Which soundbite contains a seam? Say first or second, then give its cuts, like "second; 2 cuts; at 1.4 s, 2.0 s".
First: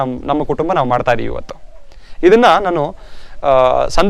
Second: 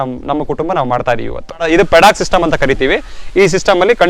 second; 1 cut; at 1.6 s